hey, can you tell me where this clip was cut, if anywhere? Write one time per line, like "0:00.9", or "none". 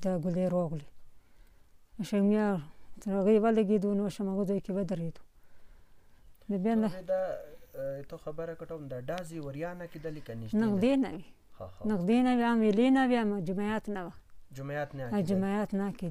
none